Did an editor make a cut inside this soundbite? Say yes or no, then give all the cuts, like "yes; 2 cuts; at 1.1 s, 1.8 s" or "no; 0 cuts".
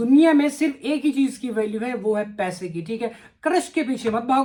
no; 0 cuts